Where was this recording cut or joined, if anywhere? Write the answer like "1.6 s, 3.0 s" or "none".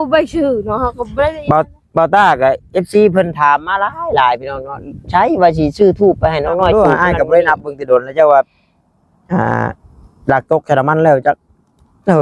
6.7 s